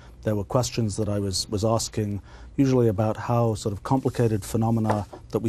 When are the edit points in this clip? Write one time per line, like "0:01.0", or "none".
0:03.8